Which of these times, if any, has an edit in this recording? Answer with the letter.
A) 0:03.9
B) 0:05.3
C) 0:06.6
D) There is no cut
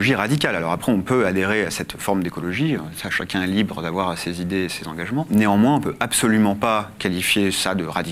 B